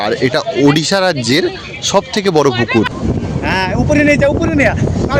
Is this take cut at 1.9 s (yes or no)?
no